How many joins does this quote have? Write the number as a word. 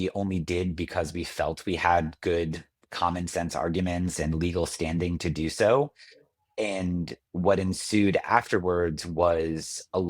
zero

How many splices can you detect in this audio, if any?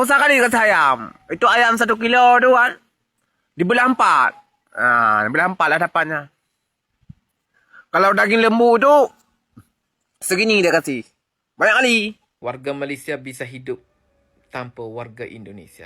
one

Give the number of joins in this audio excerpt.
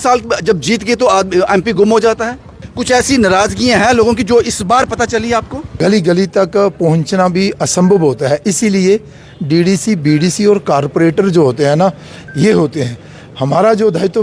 two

